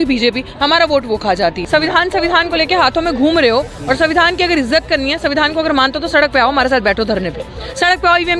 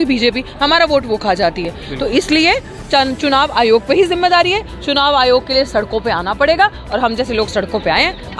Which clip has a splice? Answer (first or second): first